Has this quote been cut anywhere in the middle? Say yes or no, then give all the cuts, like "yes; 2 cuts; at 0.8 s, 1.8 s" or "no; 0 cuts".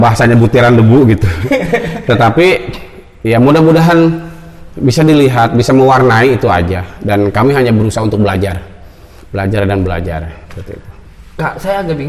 no; 0 cuts